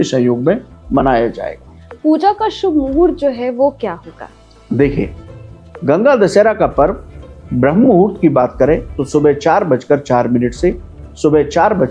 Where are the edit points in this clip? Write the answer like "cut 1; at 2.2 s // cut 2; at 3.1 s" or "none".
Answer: none